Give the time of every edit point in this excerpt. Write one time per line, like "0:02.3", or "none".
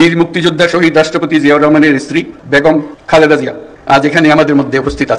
none